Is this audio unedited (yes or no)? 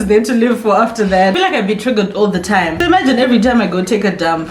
no